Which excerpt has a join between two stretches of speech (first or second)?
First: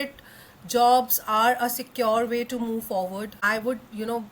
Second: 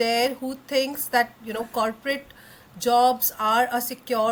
first